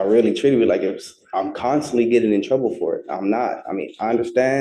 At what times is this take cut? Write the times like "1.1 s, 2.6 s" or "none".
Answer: none